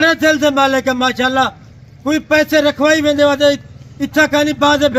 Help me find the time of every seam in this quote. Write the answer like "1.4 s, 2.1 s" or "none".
none